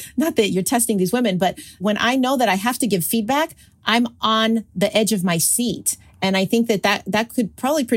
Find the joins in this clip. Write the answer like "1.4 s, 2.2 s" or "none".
1.8 s, 4.7 s